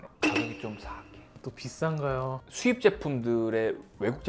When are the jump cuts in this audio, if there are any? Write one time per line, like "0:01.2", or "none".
none